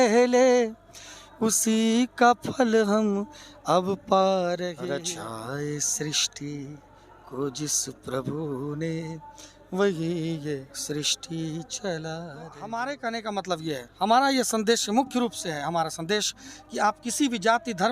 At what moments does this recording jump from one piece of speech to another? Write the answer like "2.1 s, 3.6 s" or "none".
4.8 s, 12.6 s